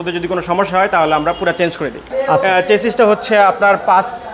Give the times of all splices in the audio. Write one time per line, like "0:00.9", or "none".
0:02.1

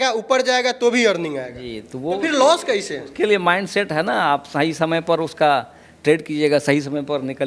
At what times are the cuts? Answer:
none

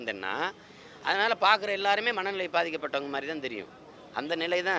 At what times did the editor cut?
none

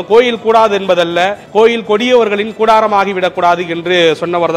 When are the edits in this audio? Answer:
0:01.4

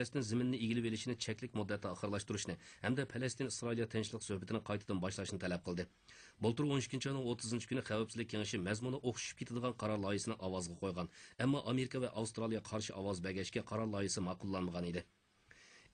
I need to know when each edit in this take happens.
0:09.0

